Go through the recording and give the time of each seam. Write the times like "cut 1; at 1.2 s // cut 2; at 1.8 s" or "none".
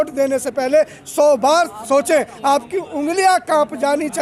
none